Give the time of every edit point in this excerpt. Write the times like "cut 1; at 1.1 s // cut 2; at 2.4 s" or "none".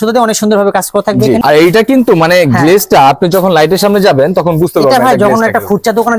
cut 1; at 1.4 s